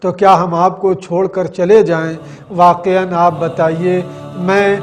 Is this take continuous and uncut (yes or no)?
yes